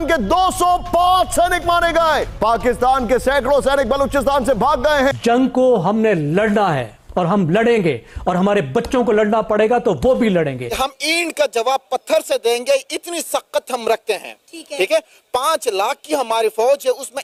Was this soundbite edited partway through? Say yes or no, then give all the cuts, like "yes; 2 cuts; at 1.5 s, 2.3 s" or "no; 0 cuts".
no; 0 cuts